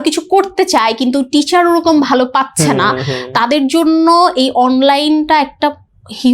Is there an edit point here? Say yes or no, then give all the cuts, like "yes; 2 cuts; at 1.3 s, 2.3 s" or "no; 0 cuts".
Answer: no; 0 cuts